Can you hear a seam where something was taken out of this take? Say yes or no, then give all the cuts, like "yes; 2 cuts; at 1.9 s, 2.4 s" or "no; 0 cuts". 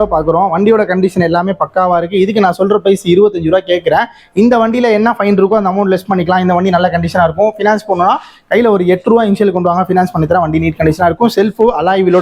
no; 0 cuts